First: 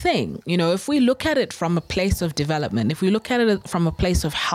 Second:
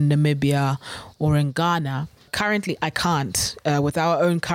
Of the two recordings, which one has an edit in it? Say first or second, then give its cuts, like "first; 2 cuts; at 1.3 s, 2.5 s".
second; 1 cut; at 2.3 s